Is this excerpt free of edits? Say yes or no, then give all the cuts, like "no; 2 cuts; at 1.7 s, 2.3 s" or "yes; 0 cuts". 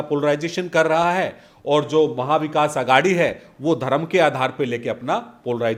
yes; 0 cuts